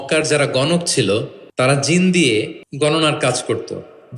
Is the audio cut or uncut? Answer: cut